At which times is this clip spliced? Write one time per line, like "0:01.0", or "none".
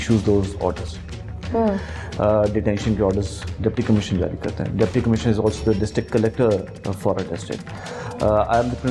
none